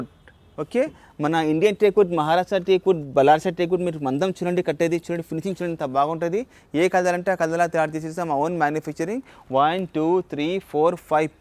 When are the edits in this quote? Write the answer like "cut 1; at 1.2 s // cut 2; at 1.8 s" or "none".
none